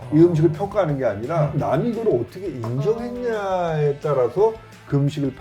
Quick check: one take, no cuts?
no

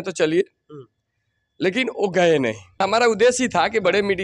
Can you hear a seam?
yes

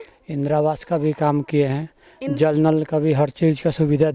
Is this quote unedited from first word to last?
yes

